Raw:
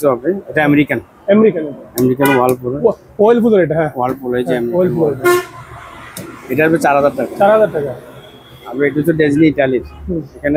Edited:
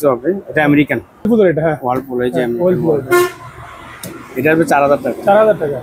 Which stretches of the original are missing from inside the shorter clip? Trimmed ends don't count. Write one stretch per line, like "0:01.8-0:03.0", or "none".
0:01.2-0:03.4